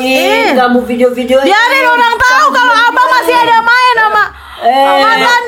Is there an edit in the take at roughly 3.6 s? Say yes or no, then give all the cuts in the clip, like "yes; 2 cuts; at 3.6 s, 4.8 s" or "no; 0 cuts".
no; 0 cuts